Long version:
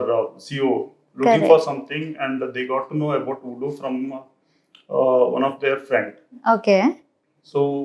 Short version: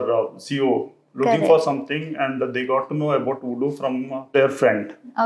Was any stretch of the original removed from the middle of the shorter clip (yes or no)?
yes